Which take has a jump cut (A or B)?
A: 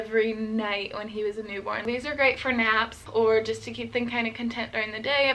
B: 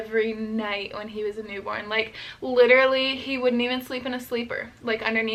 A